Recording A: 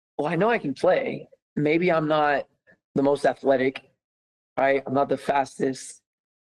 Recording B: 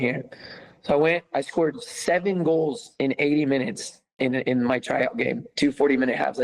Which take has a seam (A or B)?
B